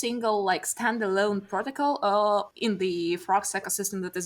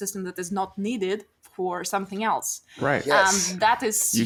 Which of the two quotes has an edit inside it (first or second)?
first